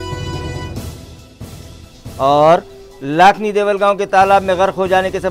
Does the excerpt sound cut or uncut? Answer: cut